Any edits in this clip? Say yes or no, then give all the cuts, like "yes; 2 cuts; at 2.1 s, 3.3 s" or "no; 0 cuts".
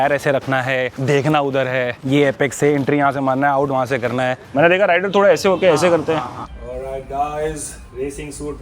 yes; 3 cuts; at 0.9 s, 4.4 s, 6.4 s